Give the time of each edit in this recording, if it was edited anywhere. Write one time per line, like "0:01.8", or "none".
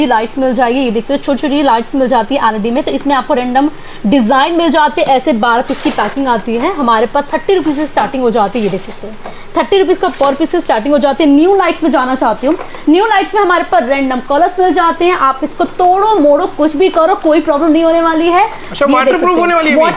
none